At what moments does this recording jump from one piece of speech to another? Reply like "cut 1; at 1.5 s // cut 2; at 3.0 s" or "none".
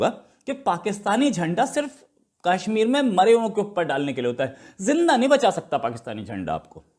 none